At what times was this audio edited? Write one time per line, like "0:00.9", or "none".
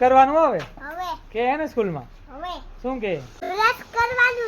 0:03.3